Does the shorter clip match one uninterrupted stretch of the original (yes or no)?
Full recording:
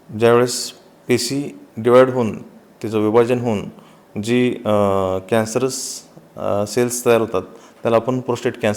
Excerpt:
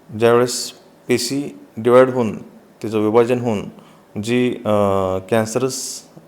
yes